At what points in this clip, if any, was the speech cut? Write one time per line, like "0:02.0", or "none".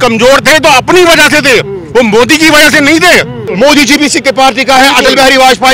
0:03.4